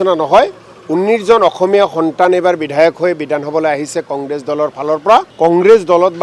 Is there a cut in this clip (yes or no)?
yes